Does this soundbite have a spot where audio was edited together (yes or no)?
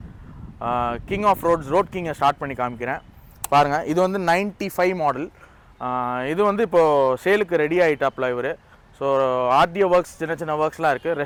no